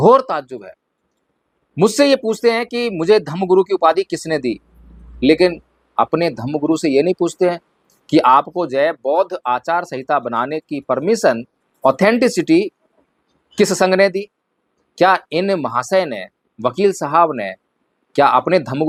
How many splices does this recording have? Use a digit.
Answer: 0